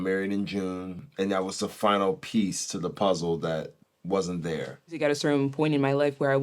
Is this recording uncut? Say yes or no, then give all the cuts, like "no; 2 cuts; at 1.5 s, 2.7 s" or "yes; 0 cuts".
no; 3 cuts; at 1.0 s, 3.7 s, 5.0 s